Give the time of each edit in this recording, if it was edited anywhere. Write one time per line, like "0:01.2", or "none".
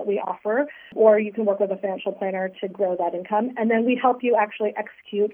0:00.9